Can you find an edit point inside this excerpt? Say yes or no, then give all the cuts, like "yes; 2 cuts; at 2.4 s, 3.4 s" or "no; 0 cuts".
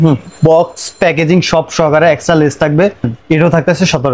yes; 1 cut; at 3.1 s